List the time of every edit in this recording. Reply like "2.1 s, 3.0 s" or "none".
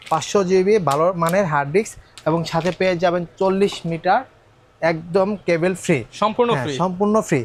none